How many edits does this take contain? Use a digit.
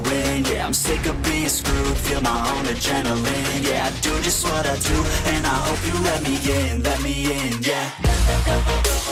0